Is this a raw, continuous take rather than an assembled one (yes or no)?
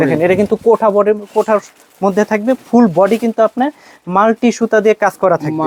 yes